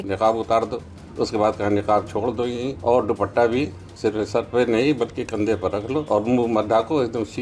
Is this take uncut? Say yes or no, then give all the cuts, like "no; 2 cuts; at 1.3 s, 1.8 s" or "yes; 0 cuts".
no; 4 cuts; at 1.0 s, 2.7 s, 3.8 s, 6.1 s